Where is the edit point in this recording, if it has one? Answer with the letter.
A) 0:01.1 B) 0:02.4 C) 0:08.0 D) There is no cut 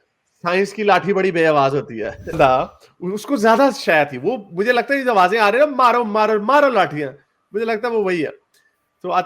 B